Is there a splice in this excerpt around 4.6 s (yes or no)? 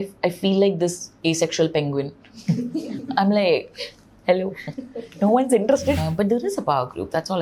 no